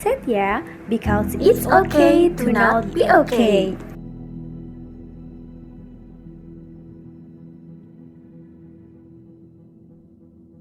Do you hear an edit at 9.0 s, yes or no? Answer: yes